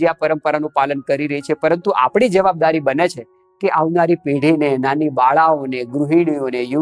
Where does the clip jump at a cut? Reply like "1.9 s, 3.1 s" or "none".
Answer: none